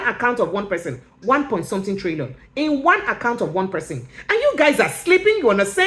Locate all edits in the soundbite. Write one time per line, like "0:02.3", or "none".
none